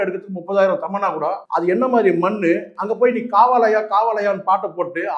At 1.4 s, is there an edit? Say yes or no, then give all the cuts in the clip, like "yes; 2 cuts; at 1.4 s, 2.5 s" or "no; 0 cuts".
yes; 1 cut; at 1.4 s